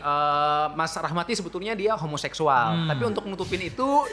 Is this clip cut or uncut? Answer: uncut